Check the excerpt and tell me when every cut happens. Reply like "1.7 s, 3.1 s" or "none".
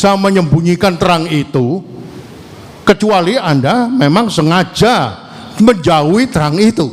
none